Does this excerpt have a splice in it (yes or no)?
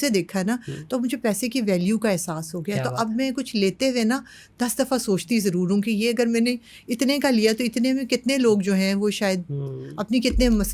no